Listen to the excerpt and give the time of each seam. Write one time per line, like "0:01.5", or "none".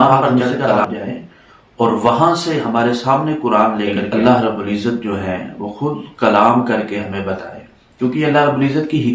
0:04.0